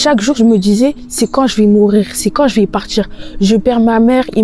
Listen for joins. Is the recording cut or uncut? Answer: uncut